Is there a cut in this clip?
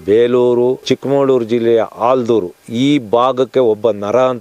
no; 0 cuts

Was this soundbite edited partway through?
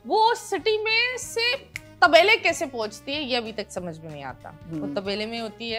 no; 0 cuts

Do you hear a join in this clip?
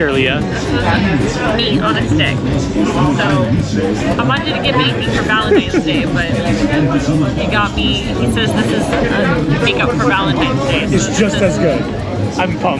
no; 0 cuts

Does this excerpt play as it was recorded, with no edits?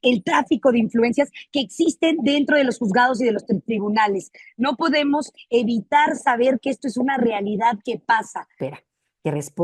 no; 1 cut; at 8.6 s

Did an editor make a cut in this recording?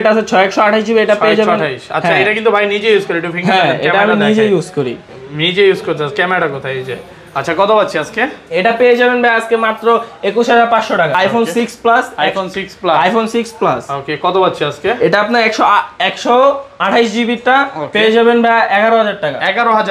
yes; 1 cut; at 11.1 s

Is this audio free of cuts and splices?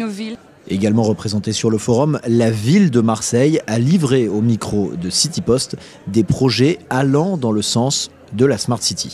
yes; 0 cuts

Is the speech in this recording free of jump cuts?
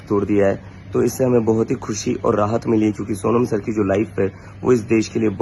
yes; 0 cuts

